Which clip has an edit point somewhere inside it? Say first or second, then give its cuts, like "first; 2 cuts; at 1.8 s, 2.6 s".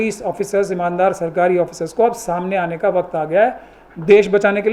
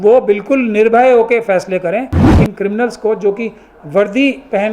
second; 1 cut; at 2.2 s